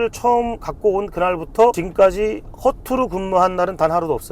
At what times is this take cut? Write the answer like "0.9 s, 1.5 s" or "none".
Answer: 1.8 s